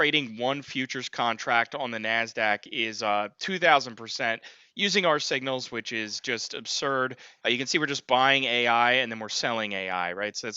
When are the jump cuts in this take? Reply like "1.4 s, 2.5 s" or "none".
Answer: none